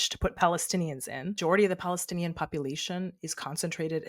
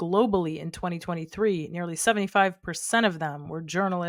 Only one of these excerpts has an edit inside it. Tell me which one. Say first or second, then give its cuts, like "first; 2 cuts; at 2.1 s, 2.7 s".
first; 1 cut; at 1.3 s